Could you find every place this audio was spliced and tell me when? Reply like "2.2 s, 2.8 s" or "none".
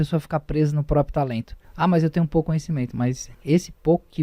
1.6 s, 3.3 s